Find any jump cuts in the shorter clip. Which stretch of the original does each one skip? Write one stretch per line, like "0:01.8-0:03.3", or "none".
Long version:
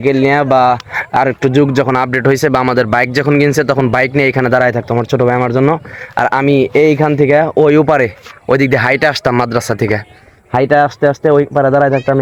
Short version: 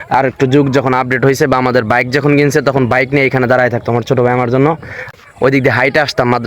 0:06.1-0:08.2

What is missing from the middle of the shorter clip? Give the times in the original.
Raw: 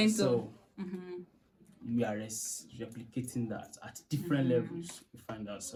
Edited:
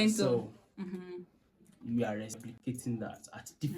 0:02.5-0:03.0

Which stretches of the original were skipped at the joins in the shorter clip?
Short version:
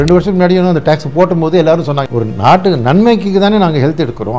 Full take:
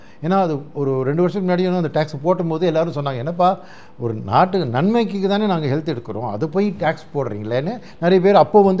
0:03.1-0:03.9

